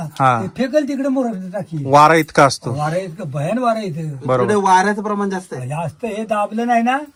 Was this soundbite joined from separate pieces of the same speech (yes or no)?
no